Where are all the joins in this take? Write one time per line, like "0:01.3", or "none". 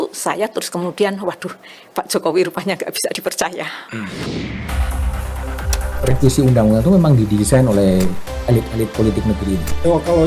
0:04.2